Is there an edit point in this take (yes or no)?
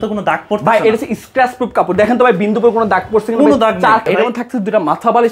yes